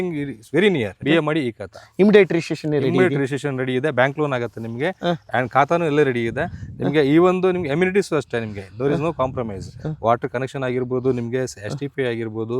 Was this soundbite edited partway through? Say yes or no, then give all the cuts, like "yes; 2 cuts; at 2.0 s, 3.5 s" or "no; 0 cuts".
yes; 1 cut; at 1.0 s